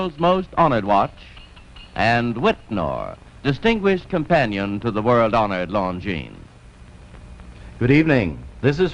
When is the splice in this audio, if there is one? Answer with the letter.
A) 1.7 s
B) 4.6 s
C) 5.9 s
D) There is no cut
B